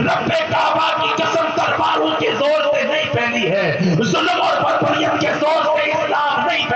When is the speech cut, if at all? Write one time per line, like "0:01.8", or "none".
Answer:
none

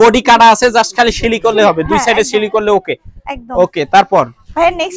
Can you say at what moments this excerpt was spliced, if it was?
none

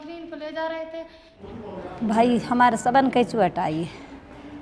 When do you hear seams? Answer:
0:01.4

